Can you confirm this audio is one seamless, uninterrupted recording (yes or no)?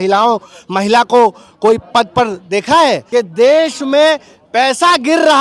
no